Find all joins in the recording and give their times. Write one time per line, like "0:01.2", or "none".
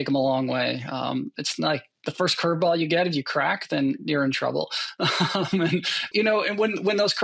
0:06.1